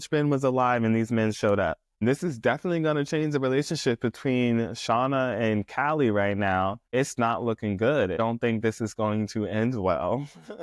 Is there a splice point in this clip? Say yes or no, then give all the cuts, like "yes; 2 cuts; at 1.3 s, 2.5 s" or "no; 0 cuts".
yes; 3 cuts; at 2.0 s, 6.9 s, 8.2 s